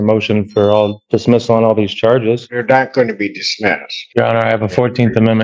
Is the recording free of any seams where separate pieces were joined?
no; 3 cuts; at 1.0 s, 2.5 s, 3.9 s

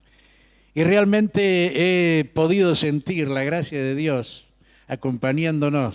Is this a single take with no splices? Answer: no; 1 cut; at 1.7 s

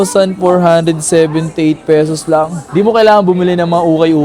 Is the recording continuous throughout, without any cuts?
no; 1 cut; at 2.6 s

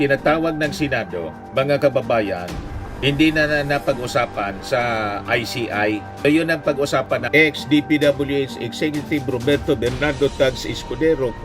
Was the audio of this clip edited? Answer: yes; 1 cut; at 7.3 s

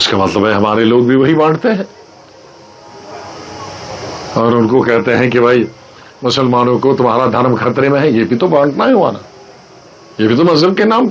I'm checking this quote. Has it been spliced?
no; 0 cuts

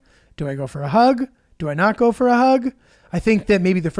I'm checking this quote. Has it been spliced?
no; 0 cuts

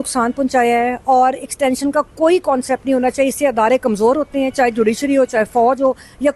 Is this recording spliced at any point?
no; 0 cuts

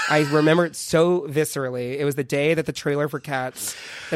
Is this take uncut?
yes; 0 cuts

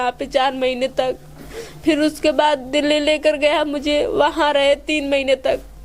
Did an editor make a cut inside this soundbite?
no; 0 cuts

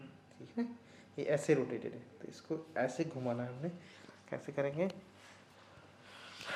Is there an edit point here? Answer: no; 0 cuts

